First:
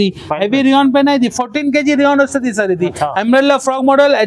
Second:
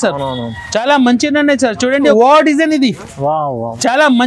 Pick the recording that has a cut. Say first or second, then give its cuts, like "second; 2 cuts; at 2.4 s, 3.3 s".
second; 1 cut; at 2.1 s